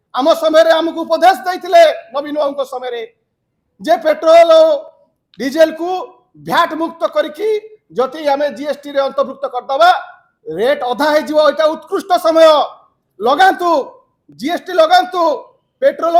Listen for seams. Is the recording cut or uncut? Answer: uncut